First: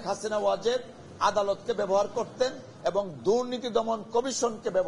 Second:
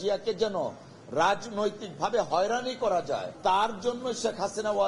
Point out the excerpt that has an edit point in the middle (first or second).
second